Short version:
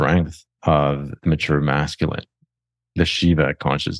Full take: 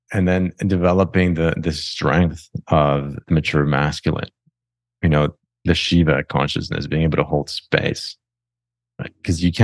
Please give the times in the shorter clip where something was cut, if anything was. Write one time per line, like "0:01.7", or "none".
0:02.8